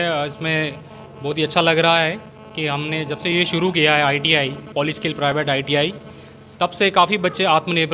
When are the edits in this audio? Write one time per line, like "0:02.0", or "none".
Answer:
none